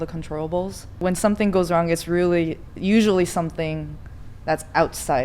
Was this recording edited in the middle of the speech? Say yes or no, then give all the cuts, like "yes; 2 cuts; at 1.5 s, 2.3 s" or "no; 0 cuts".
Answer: yes; 1 cut; at 1.0 s